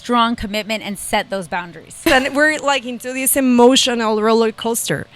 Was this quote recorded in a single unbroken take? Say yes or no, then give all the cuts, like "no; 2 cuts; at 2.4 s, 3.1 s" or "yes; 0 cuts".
no; 1 cut; at 2.0 s